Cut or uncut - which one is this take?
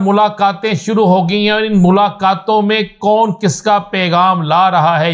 uncut